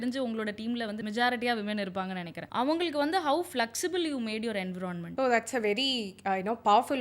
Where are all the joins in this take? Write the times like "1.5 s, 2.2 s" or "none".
1.0 s, 2.3 s, 5.1 s

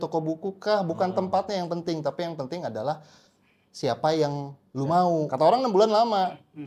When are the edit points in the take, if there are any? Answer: 5.3 s

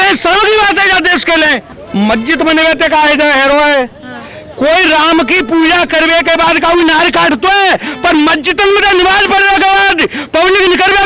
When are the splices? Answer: none

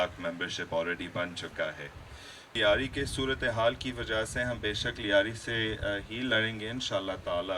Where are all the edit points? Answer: 2.5 s

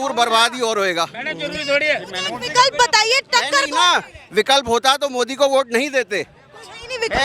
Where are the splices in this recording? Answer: none

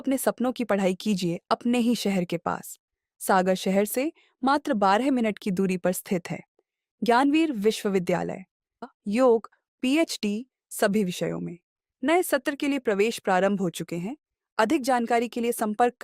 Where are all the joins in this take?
8.8 s

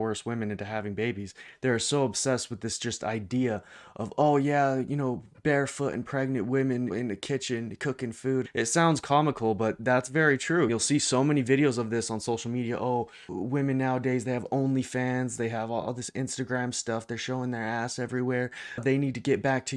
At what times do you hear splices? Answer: 6.9 s, 8.5 s, 10.7 s, 13.3 s

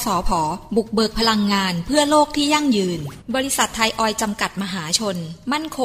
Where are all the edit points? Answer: 3.1 s

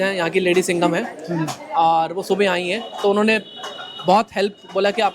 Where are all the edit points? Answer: none

